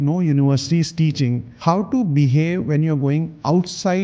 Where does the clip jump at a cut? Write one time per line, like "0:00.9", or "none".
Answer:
0:01.5